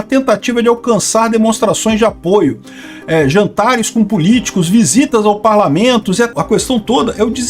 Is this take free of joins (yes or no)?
no